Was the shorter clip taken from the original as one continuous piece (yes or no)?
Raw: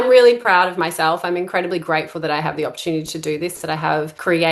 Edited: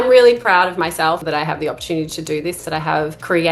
no